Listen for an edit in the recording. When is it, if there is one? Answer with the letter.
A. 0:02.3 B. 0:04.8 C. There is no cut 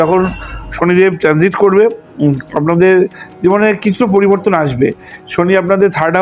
C